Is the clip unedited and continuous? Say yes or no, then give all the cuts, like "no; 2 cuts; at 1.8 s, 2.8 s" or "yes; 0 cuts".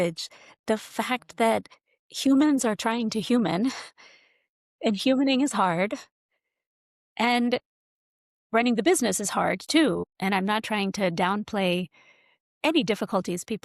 no; 1 cut; at 10.1 s